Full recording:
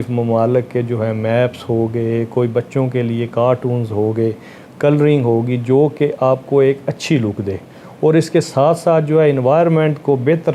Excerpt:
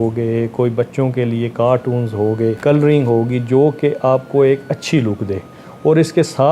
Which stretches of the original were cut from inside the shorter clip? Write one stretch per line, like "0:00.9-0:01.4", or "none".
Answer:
0:04.3-0:04.7